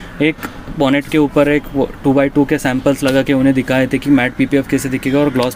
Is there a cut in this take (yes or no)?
no